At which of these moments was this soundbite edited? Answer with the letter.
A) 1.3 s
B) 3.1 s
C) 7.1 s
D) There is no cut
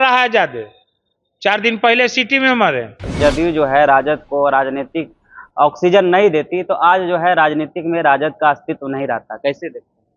B